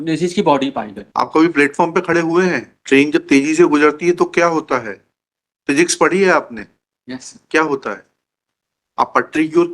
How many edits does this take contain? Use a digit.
2